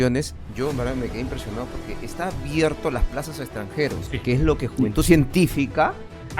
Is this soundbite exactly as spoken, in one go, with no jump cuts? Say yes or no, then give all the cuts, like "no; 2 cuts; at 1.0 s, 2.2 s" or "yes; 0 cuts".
no; 1 cut; at 4.1 s